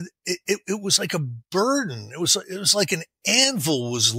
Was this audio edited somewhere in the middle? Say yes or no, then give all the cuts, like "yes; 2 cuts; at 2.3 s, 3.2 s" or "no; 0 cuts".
no; 0 cuts